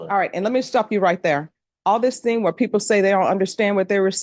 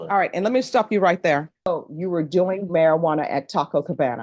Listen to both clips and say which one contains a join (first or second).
second